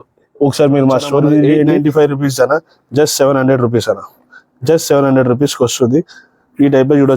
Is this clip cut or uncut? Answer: cut